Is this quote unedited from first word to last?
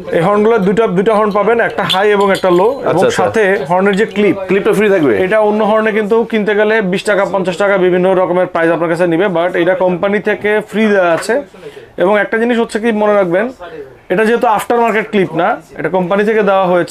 yes; 0 cuts

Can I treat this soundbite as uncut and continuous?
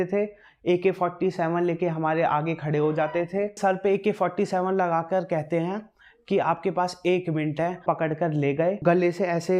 no; 3 cuts; at 3.6 s, 7.8 s, 8.8 s

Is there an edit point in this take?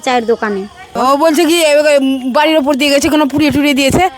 yes; 1 cut; at 0.9 s

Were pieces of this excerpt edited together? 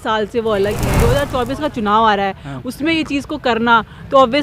yes; 1 cut; at 1.1 s

